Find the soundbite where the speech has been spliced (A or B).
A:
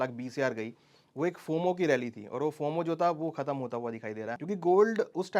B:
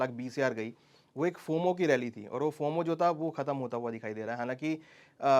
A